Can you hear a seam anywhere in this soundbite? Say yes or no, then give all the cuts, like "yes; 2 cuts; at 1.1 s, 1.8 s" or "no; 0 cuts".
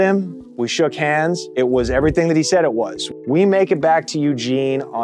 yes; 1 cut; at 3.0 s